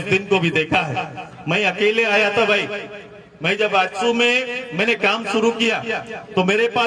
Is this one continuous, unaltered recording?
yes; 0 cuts

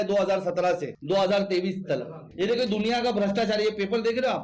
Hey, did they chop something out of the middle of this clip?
yes; 2 cuts; at 0.9 s, 2.2 s

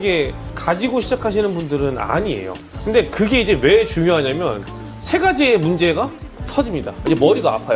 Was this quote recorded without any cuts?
yes; 0 cuts

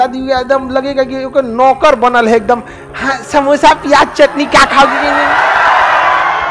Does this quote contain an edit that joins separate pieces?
no; 0 cuts

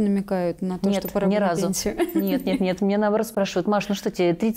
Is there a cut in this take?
no; 0 cuts

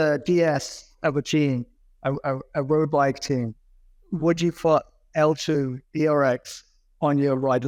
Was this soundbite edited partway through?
no; 0 cuts

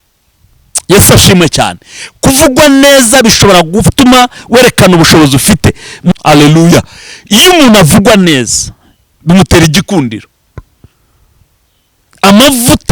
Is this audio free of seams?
no; 1 cut; at 6.1 s

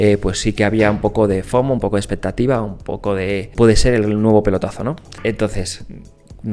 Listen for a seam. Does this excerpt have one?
yes; 2 cuts; at 3.5 s, 5.1 s

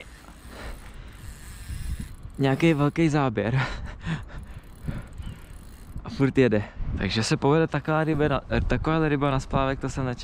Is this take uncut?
no; 1 cut; at 6.8 s

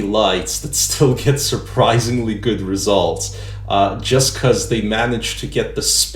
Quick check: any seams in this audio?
no; 0 cuts

